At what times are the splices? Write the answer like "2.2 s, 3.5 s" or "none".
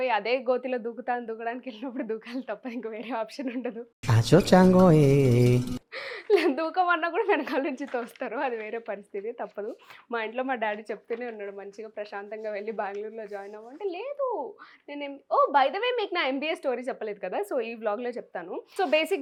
none